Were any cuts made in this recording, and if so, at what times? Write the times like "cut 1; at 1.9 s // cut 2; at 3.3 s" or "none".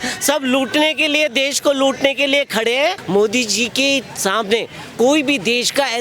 cut 1; at 3.0 s